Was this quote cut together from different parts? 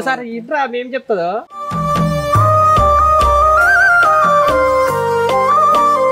no; 0 cuts

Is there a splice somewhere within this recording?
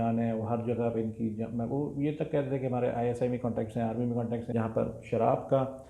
yes; 1 cut; at 4.4 s

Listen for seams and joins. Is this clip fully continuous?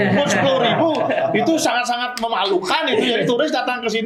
yes; 0 cuts

